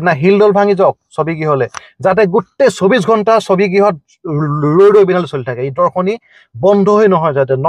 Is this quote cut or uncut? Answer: uncut